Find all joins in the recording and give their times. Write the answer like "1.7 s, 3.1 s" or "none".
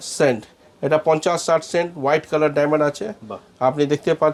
none